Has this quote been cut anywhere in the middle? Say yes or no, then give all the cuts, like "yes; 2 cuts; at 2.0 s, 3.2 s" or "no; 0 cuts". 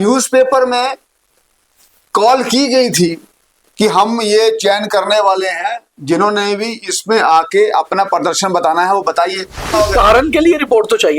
yes; 1 cut; at 9.7 s